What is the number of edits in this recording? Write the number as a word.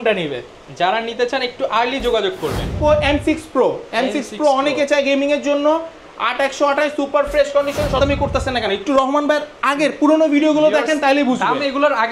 two